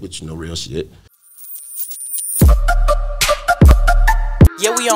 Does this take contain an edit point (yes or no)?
yes